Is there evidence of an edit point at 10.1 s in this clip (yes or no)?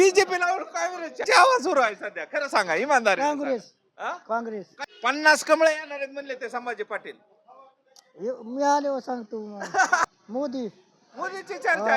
yes